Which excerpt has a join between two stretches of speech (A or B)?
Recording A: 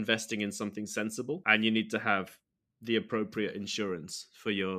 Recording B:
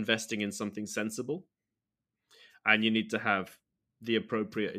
A